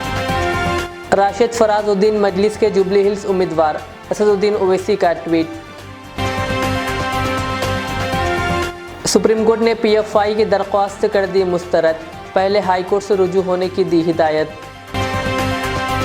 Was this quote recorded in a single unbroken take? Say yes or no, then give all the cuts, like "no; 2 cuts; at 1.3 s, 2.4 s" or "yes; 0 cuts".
no; 1 cut; at 0.9 s